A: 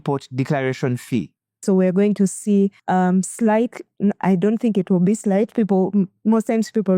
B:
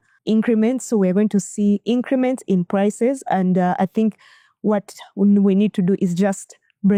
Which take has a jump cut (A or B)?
A